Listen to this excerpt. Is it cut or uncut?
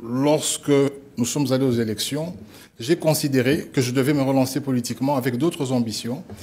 uncut